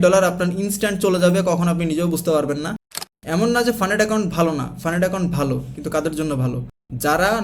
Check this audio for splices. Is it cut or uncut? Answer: cut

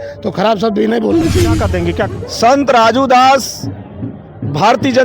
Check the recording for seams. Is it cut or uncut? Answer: cut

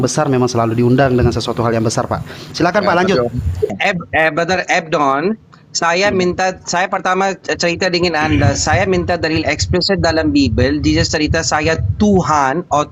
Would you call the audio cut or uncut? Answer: cut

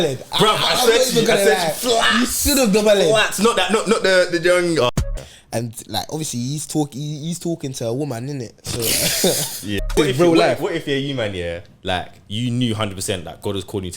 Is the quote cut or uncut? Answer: cut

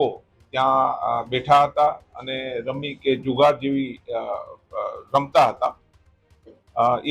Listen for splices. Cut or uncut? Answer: uncut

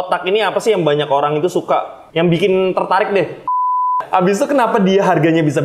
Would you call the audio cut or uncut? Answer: cut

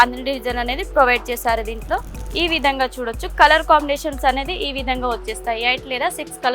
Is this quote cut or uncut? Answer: cut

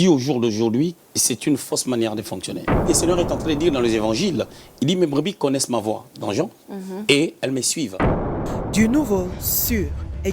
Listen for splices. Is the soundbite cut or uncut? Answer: cut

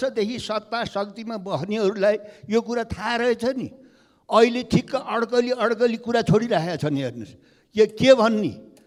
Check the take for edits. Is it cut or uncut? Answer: uncut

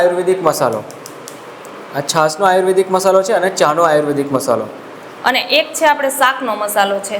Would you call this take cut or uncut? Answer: uncut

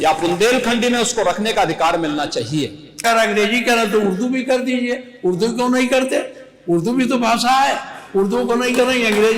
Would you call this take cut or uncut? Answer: cut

